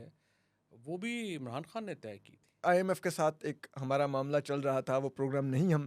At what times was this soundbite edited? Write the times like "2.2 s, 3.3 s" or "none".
2.6 s

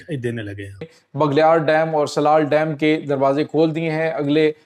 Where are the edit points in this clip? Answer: 1.2 s

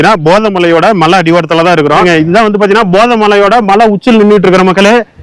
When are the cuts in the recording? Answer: 2.0 s

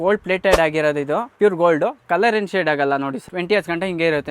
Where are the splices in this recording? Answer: 1.3 s, 3.2 s

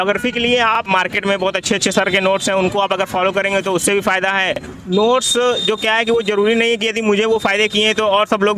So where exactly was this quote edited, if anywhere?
0.9 s, 4.7 s

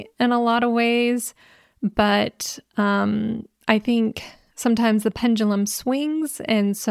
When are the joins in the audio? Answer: 5.2 s

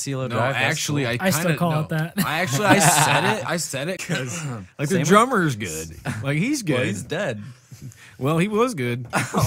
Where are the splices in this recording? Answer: 4.0 s

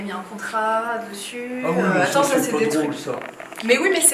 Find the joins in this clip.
none

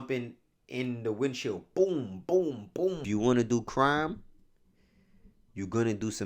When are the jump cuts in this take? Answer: 3.0 s

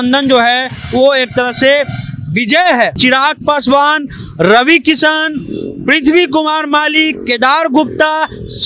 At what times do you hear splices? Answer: 2.9 s

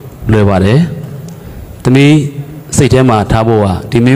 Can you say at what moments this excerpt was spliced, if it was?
none

